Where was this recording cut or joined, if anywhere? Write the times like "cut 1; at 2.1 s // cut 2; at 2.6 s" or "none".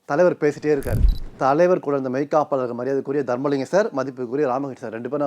cut 1; at 1.2 s